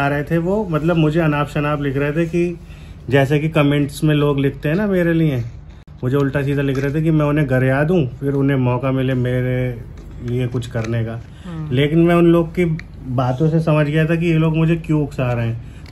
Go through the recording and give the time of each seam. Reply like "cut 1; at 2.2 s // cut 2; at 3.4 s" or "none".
none